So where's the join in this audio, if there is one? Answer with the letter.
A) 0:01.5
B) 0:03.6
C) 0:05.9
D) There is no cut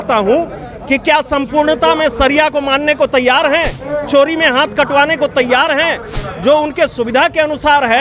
D